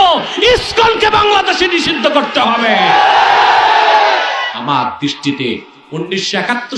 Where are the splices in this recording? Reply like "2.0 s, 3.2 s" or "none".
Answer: 4.5 s